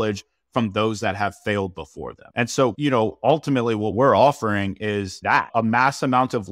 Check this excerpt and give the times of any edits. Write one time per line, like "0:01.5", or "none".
0:02.7
0:05.5